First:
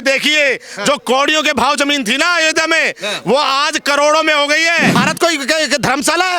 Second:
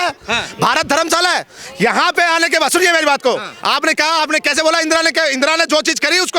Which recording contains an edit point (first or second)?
first